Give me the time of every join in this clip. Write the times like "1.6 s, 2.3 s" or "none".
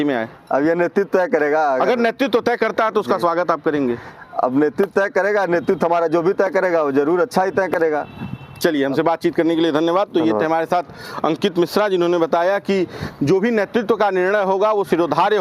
none

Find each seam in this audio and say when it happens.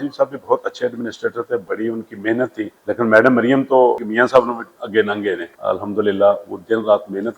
1.7 s, 2.8 s, 4.4 s, 5.5 s

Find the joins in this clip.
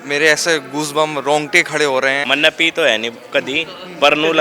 2.2 s

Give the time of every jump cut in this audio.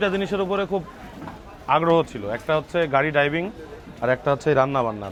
none

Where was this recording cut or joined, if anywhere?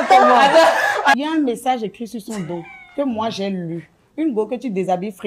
1.1 s

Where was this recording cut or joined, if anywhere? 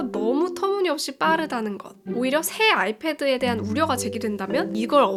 none

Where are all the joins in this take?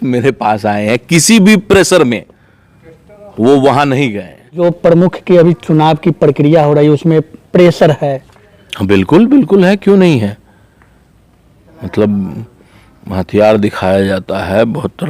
4.6 s

